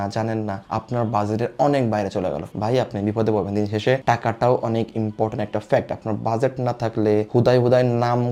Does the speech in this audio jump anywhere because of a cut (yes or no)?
no